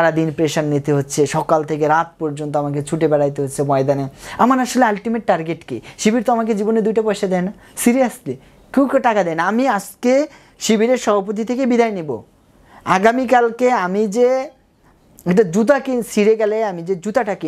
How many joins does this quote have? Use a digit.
0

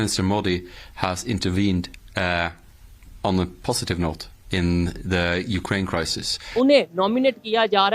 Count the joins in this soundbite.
1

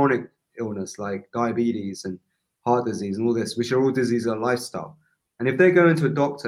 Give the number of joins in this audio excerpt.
0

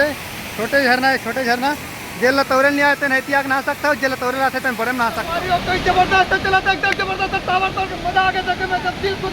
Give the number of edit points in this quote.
1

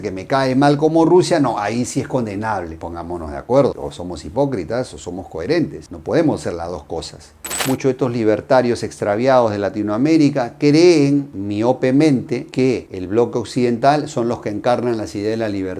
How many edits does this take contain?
1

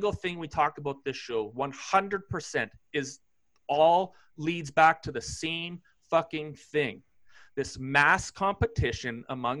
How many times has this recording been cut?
0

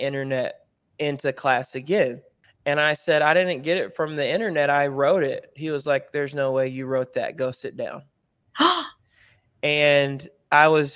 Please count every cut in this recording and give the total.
0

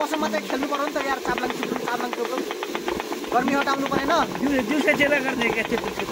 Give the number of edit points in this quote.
0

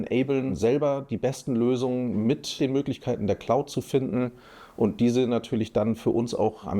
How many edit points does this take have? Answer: 1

